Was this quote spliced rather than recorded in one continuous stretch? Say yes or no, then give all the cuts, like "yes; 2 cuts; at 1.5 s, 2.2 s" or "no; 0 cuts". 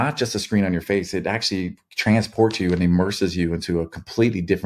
no; 0 cuts